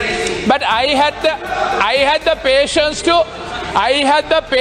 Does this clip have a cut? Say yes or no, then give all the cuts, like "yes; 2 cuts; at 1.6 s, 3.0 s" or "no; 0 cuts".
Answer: no; 0 cuts